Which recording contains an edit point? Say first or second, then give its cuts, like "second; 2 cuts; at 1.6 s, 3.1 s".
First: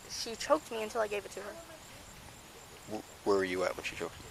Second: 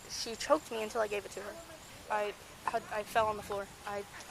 second; 1 cut; at 2.0 s